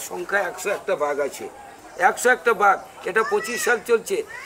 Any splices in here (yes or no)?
no